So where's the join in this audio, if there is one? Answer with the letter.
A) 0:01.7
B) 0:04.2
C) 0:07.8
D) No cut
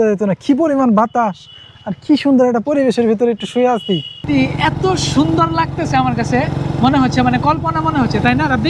B